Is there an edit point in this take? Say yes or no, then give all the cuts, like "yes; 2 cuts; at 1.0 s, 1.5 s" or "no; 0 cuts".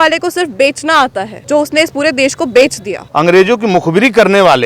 yes; 2 cuts; at 1.3 s, 3.0 s